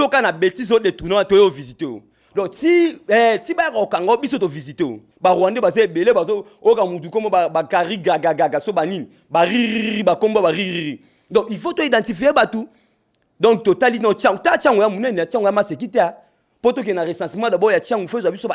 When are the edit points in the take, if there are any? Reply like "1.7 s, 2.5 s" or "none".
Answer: 5.0 s

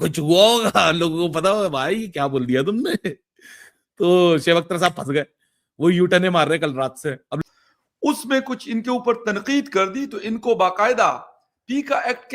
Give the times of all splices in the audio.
7.4 s

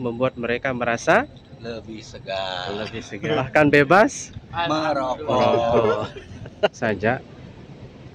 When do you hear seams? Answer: 3.4 s, 6.8 s

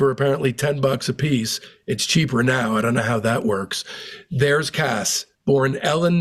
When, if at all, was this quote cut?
none

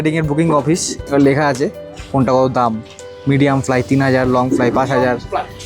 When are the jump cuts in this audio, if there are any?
1.0 s

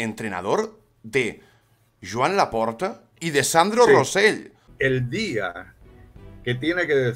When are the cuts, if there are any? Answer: 3.2 s, 4.6 s

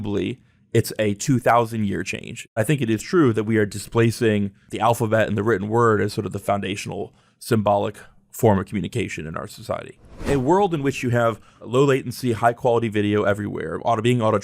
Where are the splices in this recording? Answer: 2.6 s, 4.7 s, 10.3 s, 11.6 s

